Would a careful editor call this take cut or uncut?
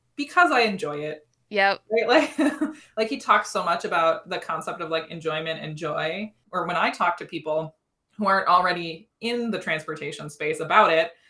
cut